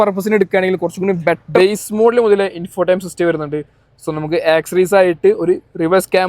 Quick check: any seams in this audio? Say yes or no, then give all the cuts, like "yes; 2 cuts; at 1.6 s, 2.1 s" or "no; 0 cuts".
yes; 1 cut; at 1.6 s